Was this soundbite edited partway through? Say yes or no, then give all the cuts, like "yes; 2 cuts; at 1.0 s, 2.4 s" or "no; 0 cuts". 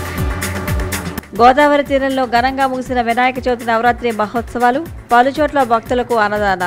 yes; 1 cut; at 1.1 s